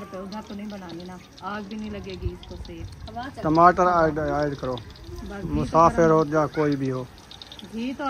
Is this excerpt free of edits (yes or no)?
yes